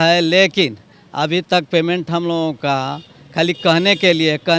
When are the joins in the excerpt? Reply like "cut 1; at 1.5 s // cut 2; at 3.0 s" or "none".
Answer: none